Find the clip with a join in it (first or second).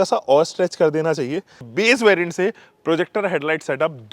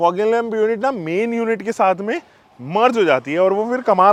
first